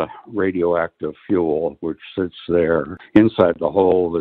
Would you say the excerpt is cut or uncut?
cut